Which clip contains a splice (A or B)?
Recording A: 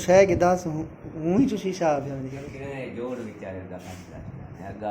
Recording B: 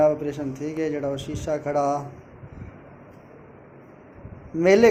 A